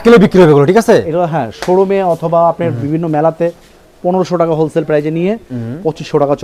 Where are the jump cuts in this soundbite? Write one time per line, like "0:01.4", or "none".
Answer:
none